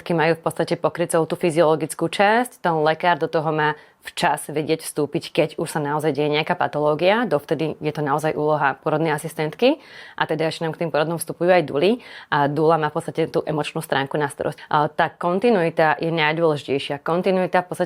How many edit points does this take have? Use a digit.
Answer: 1